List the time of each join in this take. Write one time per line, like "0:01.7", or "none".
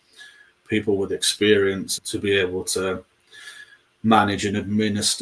0:01.9